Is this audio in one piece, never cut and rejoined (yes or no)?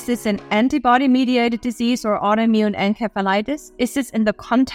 yes